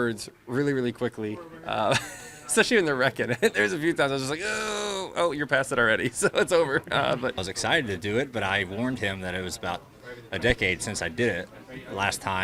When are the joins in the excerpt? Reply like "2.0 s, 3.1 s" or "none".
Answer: 7.5 s

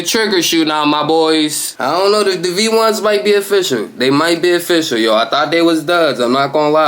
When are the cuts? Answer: 1.7 s

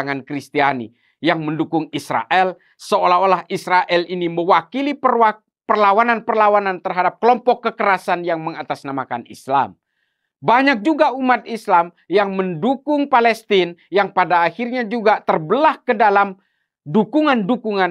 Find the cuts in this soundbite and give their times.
none

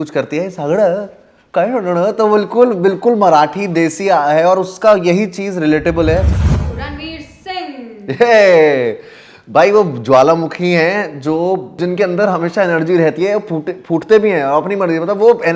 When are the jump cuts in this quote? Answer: 6.4 s, 11.8 s

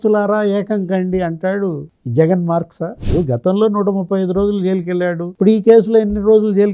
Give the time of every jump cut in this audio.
3.0 s

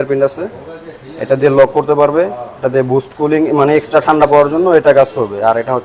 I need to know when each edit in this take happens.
none

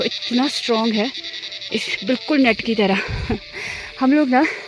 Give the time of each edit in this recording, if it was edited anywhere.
none

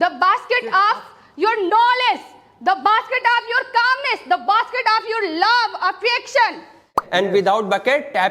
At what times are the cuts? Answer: 7.0 s

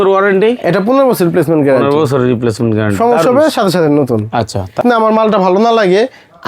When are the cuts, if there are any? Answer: 4.8 s

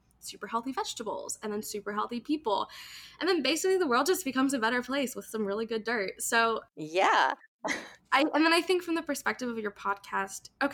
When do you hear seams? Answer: none

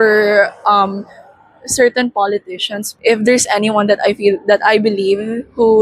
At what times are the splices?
2.8 s

